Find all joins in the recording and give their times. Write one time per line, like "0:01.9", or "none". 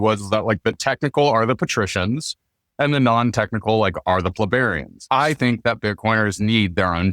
0:04.9